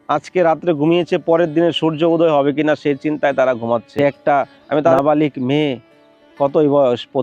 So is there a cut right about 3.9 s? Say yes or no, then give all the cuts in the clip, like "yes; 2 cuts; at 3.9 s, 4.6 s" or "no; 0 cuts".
yes; 1 cut; at 3.9 s